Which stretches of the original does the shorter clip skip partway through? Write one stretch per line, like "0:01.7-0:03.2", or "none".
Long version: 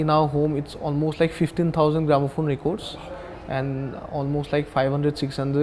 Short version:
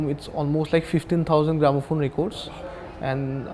none